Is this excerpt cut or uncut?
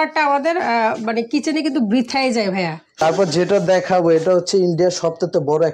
cut